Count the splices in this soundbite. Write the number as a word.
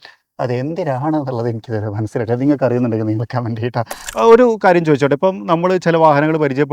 one